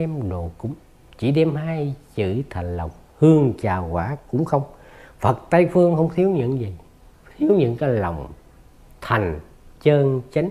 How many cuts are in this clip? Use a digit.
0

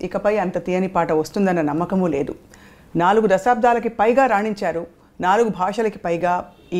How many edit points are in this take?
0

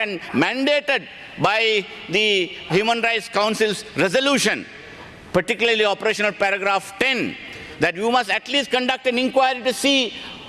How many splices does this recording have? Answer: 0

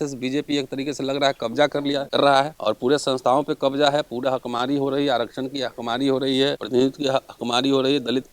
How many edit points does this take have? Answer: 2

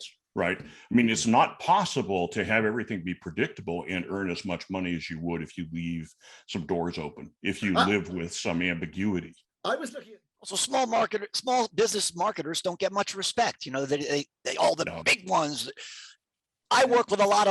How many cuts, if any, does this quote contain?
1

